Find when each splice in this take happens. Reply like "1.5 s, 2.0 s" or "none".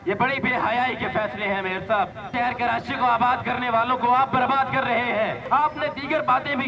2.3 s, 5.4 s